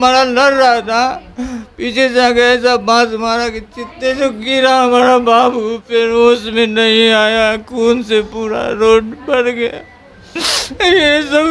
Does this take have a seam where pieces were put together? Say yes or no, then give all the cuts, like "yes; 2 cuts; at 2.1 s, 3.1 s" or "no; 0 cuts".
no; 0 cuts